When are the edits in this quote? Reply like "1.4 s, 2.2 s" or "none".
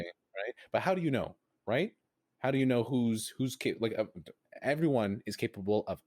4.4 s